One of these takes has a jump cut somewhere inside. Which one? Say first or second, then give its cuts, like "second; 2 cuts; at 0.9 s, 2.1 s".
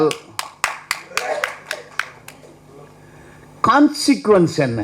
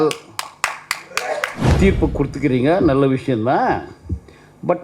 second; 1 cut; at 1.6 s